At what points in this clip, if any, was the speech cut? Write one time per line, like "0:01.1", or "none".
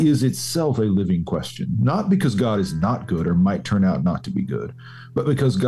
none